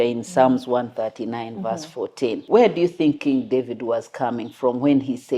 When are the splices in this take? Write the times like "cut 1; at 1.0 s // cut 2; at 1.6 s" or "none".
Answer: cut 1; at 2.4 s